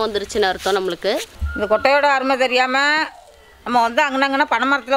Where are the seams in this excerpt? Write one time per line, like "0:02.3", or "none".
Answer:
0:01.3